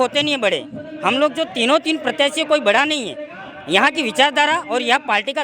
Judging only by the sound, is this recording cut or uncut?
uncut